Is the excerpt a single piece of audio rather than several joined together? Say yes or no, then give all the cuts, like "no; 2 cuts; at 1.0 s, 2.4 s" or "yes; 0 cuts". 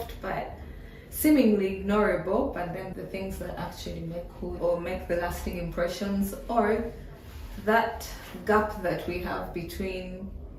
no; 1 cut; at 4.6 s